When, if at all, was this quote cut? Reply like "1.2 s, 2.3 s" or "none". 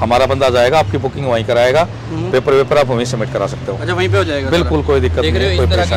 none